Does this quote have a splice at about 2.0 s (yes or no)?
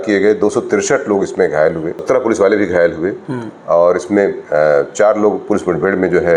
yes